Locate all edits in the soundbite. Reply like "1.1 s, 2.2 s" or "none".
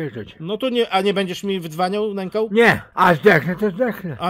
2.9 s